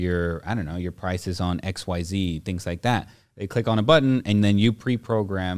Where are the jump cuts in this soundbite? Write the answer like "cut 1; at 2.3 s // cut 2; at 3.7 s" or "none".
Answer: none